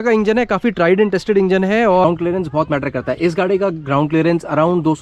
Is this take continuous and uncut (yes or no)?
no